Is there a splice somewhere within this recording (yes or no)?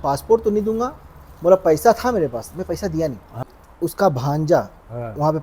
yes